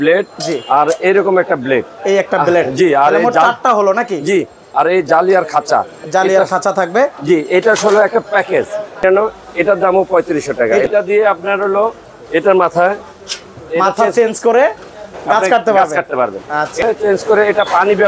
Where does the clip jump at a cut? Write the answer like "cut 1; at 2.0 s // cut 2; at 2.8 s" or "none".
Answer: cut 1; at 9.0 s // cut 2; at 10.8 s // cut 3; at 16.8 s

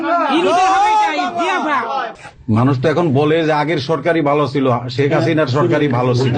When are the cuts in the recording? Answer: cut 1; at 2.3 s

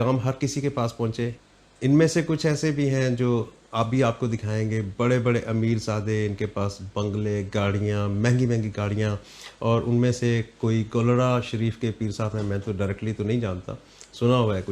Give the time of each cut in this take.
none

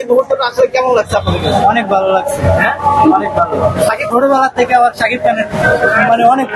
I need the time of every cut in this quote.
cut 1; at 4.0 s // cut 2; at 5.6 s

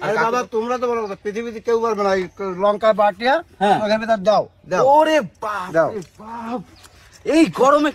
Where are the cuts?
none

